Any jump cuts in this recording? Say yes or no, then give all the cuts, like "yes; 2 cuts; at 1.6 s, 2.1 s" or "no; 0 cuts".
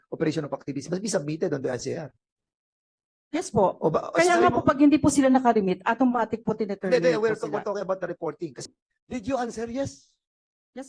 yes; 1 cut; at 8.6 s